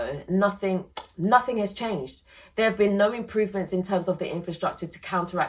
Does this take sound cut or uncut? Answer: uncut